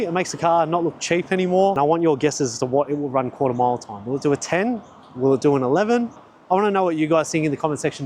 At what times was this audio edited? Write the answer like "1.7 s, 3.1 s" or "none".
1.8 s, 6.2 s